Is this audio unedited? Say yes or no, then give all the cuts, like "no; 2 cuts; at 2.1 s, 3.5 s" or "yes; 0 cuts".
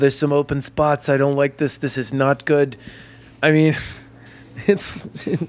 yes; 0 cuts